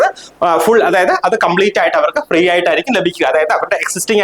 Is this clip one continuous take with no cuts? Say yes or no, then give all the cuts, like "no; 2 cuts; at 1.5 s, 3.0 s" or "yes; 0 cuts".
yes; 0 cuts